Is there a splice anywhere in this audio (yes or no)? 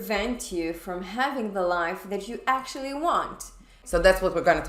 yes